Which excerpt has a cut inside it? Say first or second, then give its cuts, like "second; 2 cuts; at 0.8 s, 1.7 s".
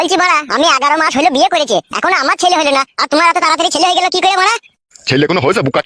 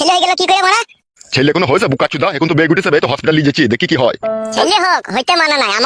second; 1 cut; at 4.6 s